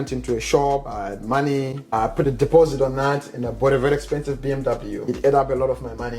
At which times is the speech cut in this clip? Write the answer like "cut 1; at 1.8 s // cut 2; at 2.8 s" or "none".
cut 1; at 0.9 s // cut 2; at 1.9 s // cut 3; at 5.1 s